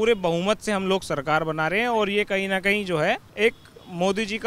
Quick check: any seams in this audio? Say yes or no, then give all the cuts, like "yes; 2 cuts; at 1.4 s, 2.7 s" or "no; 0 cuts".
yes; 1 cut; at 3.3 s